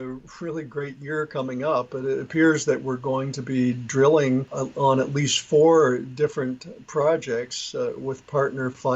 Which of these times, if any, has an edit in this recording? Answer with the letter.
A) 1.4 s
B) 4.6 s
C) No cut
B